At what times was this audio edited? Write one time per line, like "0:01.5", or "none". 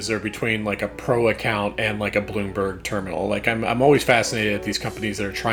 none